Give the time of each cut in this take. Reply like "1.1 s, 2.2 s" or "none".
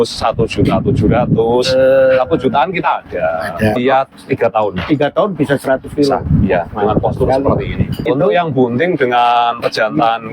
3.8 s, 8.1 s